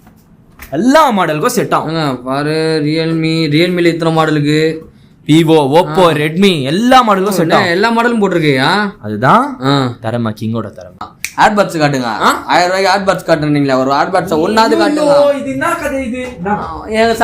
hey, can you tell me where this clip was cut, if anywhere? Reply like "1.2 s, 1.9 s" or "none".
11.2 s